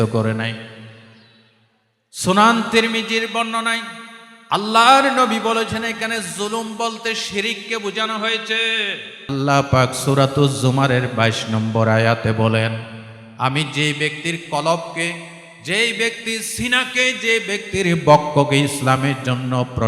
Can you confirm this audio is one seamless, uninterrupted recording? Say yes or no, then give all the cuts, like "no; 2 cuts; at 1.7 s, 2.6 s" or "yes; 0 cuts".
no; 1 cut; at 9.3 s